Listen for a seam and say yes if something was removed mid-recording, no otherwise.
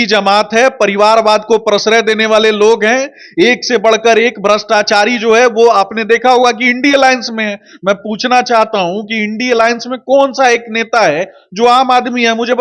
no